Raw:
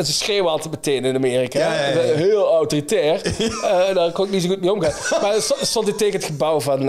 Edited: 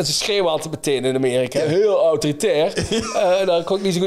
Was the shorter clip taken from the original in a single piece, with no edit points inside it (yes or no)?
no